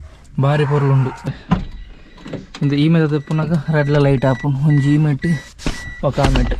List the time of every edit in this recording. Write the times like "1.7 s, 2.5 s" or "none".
1.3 s